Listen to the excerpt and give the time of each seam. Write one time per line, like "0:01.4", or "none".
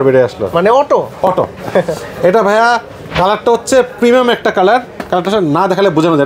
none